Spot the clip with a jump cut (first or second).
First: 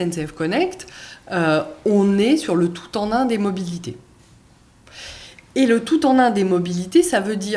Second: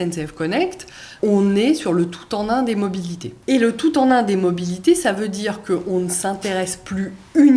second